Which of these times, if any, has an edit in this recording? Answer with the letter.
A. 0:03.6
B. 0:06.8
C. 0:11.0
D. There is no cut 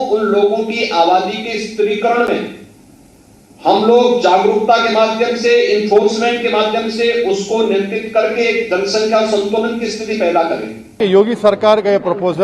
C